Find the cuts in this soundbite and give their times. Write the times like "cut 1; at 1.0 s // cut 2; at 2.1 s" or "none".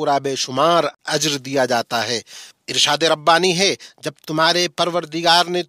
cut 1; at 1.0 s